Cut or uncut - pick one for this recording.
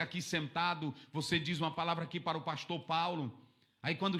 uncut